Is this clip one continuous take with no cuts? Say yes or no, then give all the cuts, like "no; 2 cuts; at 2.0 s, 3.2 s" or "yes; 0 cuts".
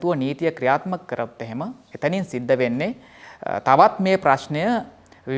yes; 0 cuts